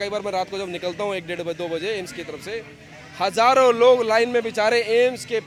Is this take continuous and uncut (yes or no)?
yes